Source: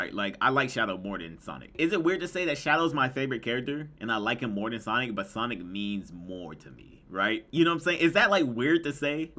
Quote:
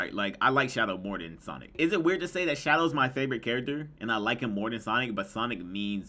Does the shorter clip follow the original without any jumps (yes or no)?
yes